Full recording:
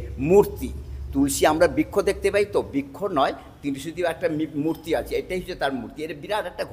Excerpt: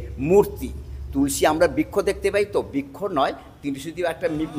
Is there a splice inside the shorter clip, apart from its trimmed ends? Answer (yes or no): no